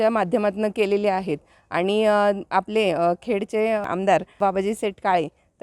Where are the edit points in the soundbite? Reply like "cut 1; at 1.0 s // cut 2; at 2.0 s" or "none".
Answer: none